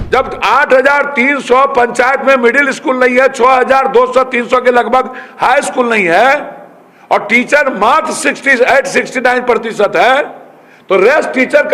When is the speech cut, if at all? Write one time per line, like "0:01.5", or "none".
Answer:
none